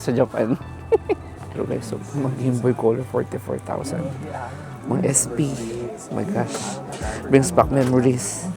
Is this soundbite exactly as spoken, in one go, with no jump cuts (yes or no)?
no